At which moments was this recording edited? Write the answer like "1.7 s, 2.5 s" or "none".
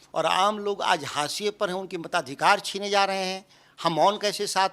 none